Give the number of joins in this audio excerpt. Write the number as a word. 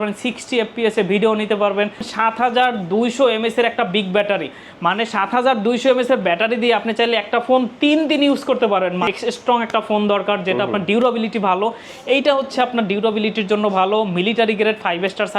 two